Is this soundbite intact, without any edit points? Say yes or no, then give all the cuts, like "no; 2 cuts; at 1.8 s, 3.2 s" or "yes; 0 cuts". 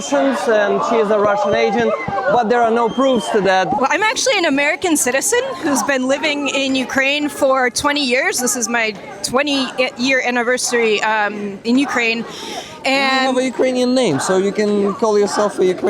no; 1 cut; at 3.8 s